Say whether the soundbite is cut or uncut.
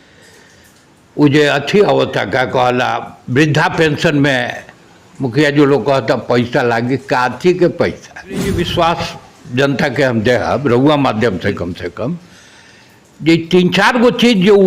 cut